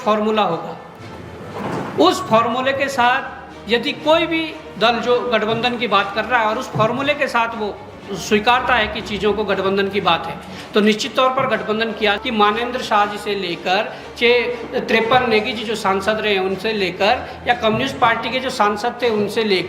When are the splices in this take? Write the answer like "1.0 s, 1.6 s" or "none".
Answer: 12.2 s